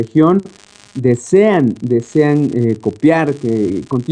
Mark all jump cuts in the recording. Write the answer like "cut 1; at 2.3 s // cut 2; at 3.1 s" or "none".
cut 1; at 2.5 s